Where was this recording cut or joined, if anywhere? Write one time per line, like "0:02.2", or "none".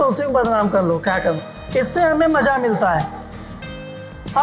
0:01.5